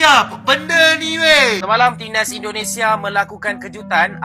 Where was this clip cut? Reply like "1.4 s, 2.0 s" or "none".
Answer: 1.6 s